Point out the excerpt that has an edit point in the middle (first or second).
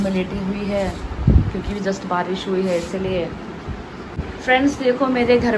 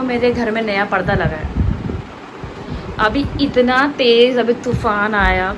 first